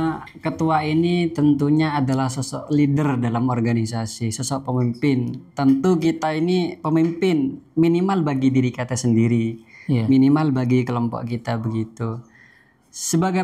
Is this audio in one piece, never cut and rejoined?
yes; 0 cuts

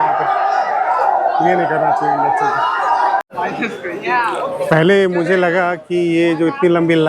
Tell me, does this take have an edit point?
yes; 1 cut; at 3.2 s

